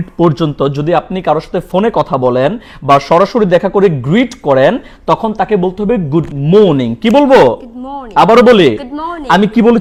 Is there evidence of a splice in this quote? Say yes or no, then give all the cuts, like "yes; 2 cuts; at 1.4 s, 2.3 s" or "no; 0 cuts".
no; 0 cuts